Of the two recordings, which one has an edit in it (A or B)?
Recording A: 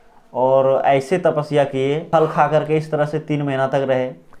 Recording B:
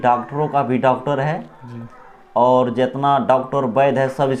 A